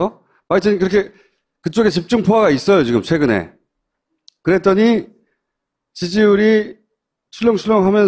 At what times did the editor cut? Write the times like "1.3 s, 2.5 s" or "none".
5.7 s